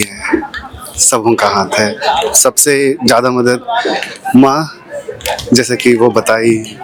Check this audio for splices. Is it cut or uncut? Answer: uncut